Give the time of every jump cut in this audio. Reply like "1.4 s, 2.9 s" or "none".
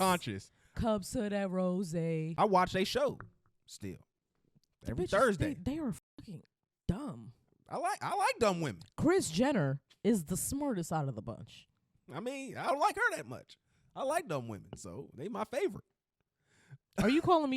2.3 s